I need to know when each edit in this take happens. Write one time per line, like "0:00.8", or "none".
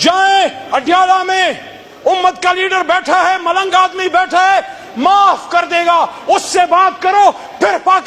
none